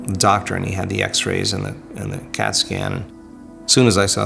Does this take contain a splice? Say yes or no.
no